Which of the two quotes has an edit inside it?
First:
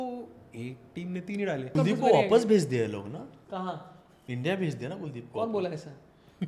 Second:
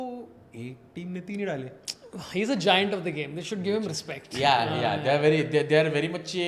first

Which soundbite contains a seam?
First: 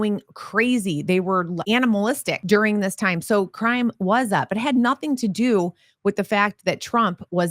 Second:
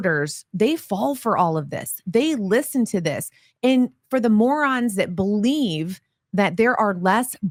first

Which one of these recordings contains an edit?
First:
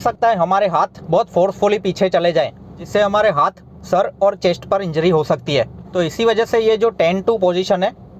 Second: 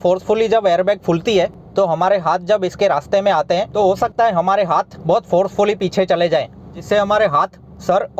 first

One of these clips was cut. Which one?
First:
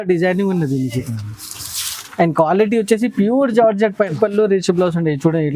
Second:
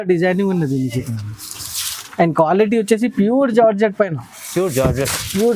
first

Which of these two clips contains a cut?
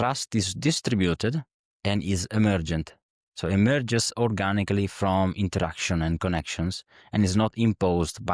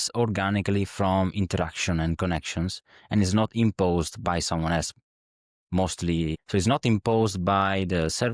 second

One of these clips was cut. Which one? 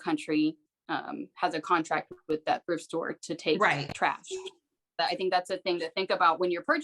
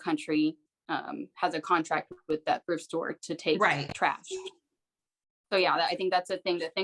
first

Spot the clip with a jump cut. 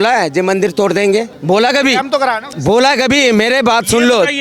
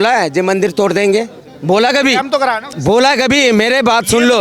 first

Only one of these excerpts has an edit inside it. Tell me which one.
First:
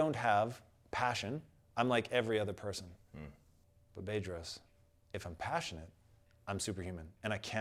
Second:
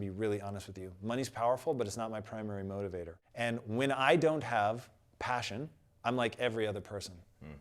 second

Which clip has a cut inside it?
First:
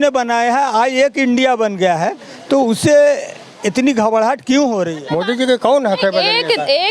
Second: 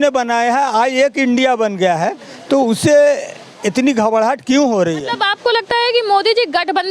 first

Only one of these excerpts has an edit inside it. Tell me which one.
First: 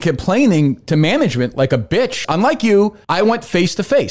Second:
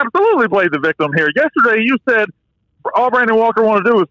first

